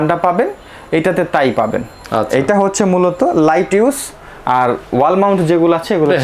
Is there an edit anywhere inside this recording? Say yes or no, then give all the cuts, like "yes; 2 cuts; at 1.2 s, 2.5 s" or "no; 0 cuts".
no; 0 cuts